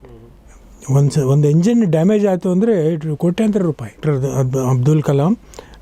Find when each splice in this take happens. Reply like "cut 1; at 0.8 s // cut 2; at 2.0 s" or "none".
cut 1; at 4.0 s